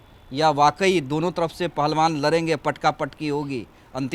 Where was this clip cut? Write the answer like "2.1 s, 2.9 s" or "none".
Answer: none